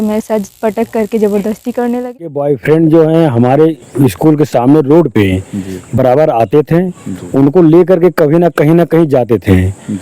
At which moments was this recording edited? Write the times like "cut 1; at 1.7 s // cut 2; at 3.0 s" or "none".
cut 1; at 2.1 s